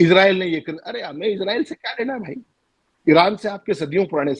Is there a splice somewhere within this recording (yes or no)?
no